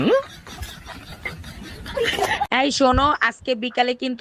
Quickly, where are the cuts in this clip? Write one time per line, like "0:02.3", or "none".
0:02.5